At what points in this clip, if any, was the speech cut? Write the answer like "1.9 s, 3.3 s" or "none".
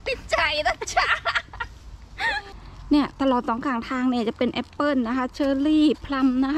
2.3 s